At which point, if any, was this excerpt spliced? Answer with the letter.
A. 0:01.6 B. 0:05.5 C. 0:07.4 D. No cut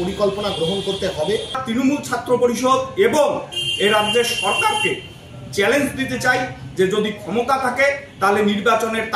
A